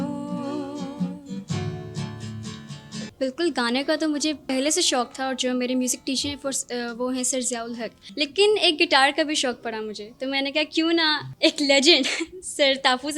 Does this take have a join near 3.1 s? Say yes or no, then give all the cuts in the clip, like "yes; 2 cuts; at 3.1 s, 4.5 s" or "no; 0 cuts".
yes; 4 cuts; at 3.1 s, 4.4 s, 8.0 s, 11.2 s